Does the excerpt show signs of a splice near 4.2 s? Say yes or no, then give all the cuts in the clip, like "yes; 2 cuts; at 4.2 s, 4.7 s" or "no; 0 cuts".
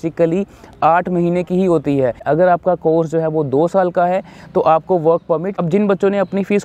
no; 2 cuts; at 2.2 s, 5.5 s